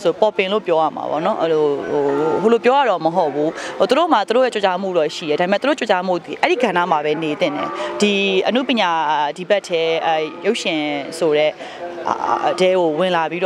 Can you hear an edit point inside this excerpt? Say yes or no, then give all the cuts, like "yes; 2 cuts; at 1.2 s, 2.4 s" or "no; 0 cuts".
no; 0 cuts